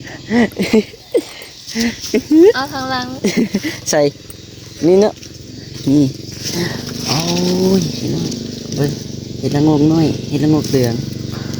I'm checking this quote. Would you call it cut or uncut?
uncut